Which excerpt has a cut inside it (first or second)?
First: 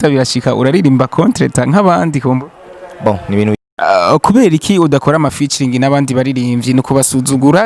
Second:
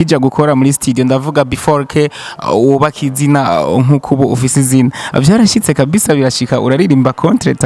first